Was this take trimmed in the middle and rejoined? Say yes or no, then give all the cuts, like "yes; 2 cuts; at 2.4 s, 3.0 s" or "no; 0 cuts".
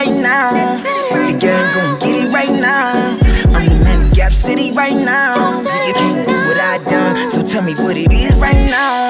no; 0 cuts